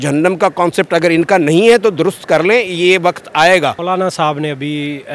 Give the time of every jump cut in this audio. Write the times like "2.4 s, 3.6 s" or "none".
3.8 s